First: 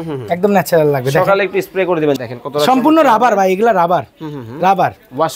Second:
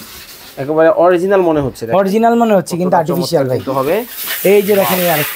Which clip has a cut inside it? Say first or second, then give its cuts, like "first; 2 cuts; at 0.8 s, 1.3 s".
first; 1 cut; at 2.2 s